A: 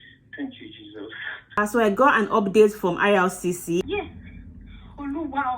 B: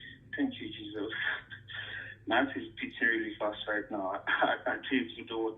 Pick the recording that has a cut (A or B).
A